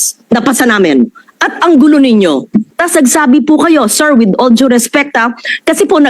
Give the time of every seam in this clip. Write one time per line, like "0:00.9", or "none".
0:01.2
0:02.8